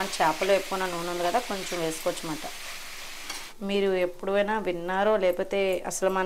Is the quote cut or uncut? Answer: cut